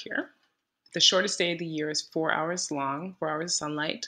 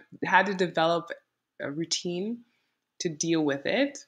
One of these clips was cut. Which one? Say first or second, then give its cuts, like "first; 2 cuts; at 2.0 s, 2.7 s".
second; 1 cut; at 1.5 s